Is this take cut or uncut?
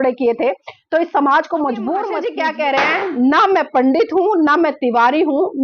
cut